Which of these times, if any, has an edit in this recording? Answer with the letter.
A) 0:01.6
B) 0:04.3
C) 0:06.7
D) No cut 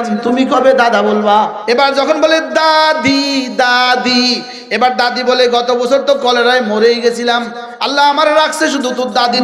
A